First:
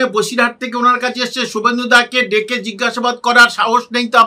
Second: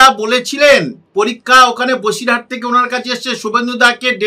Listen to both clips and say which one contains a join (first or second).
second